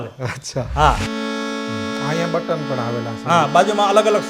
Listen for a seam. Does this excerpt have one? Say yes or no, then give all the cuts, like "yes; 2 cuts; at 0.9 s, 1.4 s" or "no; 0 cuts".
yes; 1 cut; at 1.0 s